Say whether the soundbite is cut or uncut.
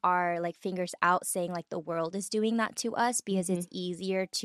uncut